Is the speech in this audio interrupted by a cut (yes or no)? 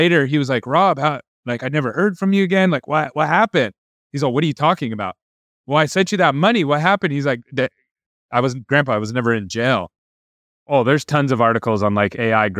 yes